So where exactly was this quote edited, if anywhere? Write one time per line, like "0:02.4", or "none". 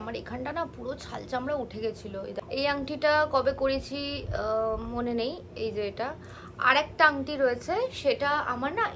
0:02.4